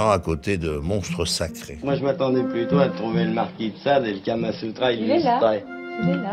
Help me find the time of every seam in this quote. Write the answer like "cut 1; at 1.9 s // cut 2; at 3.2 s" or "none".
cut 1; at 1.6 s